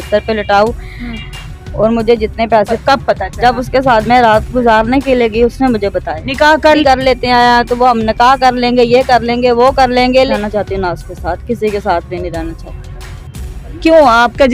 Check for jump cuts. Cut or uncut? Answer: cut